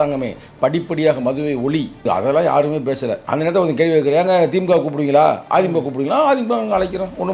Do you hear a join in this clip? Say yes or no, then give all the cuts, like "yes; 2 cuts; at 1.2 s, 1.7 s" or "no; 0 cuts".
yes; 2 cuts; at 2.0 s, 3.2 s